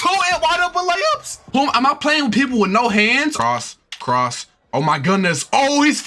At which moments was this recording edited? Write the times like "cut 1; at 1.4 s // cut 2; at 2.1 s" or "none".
cut 1; at 1.4 s // cut 2; at 3.4 s